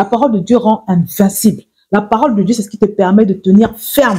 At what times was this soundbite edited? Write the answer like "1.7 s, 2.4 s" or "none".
none

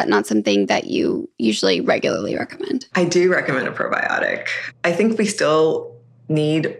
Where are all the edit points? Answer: 2.9 s, 4.8 s

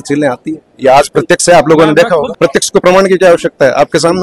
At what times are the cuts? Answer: 2.3 s

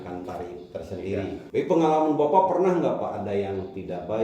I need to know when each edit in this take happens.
1.4 s

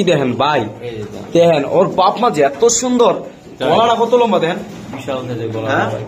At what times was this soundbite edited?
none

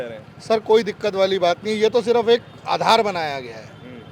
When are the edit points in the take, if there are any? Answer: none

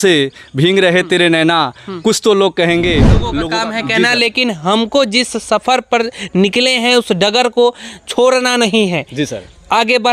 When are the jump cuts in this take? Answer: 3.3 s

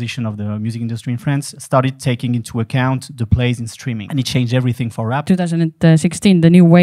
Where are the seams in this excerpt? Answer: 1.5 s, 4.0 s, 5.2 s

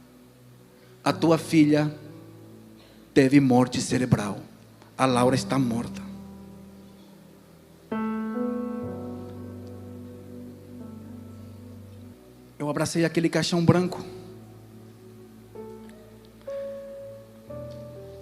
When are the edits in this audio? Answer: 12.1 s

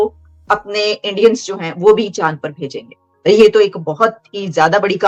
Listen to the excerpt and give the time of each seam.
none

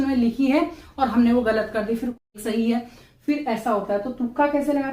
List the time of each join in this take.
2.3 s

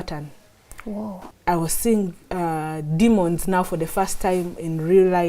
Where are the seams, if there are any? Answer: 1.2 s

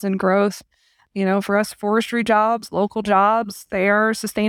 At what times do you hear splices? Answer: 1.0 s

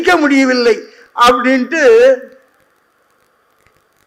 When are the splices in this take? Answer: none

